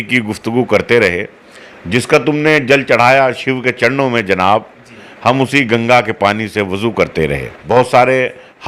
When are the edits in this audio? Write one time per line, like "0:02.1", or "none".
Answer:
0:07.5

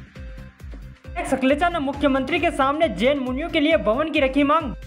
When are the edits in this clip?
0:01.1

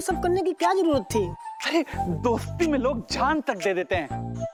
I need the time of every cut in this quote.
none

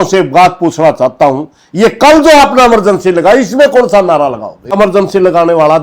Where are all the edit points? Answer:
0:04.7

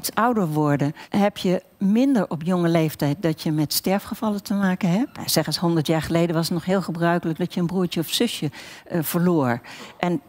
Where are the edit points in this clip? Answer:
0:01.0
0:05.3

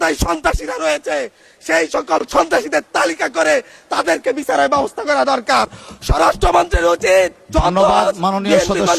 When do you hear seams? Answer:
none

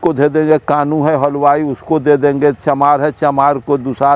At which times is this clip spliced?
none

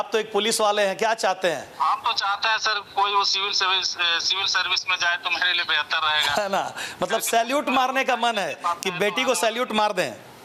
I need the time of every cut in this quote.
none

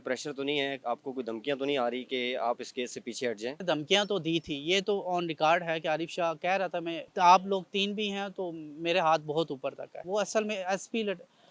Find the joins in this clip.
0:03.5
0:07.0
0:10.0

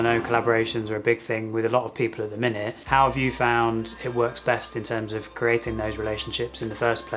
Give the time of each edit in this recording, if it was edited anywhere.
0:02.8

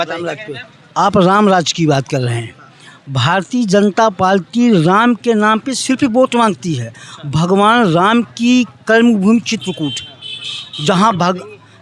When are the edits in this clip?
none

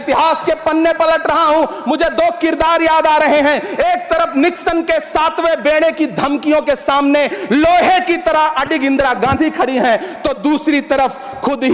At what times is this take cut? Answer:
none

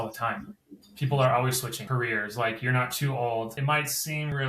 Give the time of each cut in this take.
0:01.8
0:03.5

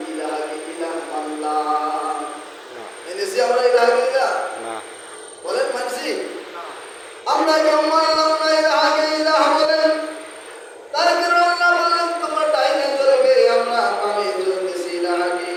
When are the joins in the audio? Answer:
none

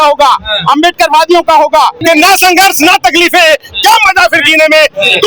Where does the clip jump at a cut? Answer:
0:02.0

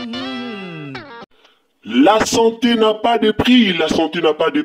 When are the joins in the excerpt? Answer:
0:01.2

